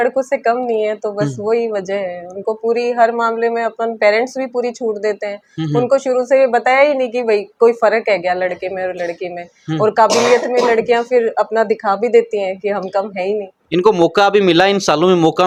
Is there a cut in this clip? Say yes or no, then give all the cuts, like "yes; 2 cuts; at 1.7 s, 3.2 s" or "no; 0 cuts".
no; 0 cuts